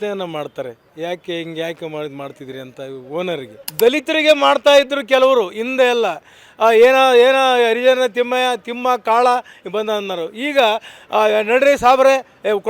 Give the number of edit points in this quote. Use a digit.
1